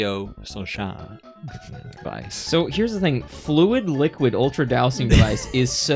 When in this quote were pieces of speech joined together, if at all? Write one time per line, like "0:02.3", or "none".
0:02.0